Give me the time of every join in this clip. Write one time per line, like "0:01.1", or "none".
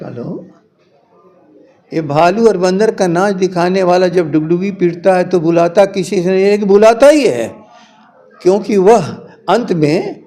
none